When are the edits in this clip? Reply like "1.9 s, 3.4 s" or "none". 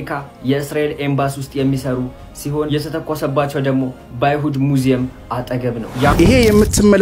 6.1 s